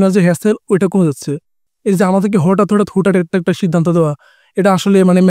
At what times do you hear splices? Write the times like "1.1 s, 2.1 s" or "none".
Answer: 1.6 s